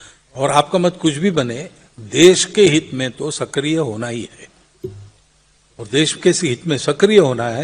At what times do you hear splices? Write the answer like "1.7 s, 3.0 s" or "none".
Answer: none

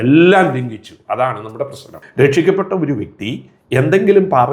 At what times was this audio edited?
2.0 s

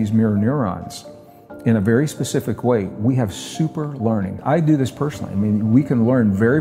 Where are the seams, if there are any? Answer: 4.4 s

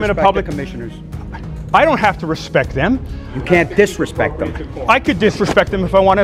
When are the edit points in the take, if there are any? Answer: none

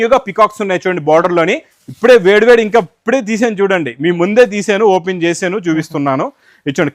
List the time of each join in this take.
1.7 s

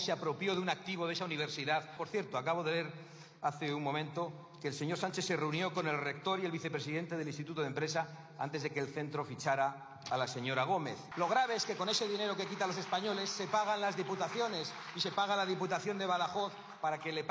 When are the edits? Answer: 2.0 s, 11.0 s

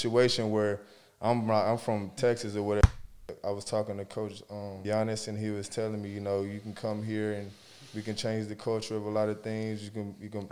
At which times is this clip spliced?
3.0 s, 4.8 s

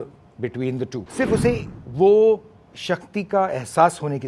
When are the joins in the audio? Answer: 1.0 s

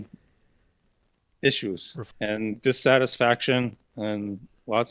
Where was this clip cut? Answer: 2.0 s

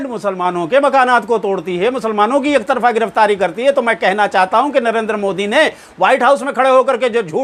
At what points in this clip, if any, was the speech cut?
none

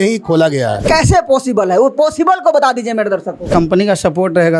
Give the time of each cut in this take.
0.8 s, 3.5 s

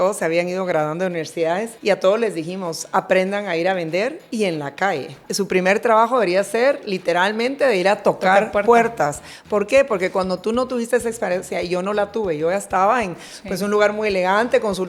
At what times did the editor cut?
1.7 s, 5.2 s

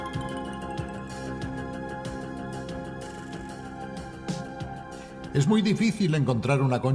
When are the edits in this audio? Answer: 5.7 s

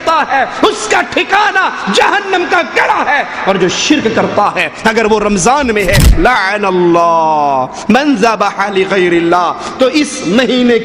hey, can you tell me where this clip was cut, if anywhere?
6.1 s

